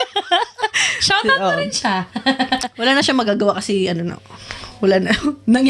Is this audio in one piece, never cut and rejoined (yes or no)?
yes